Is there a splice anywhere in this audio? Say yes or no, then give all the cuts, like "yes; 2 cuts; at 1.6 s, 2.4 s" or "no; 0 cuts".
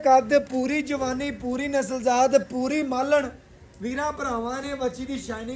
no; 0 cuts